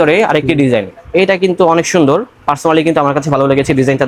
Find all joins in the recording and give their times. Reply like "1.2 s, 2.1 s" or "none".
none